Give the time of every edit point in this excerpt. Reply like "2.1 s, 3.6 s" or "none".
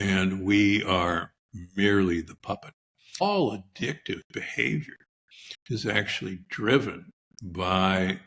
3.2 s